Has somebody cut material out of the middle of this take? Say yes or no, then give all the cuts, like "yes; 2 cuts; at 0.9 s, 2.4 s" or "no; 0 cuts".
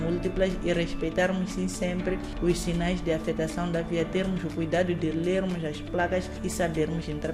no; 0 cuts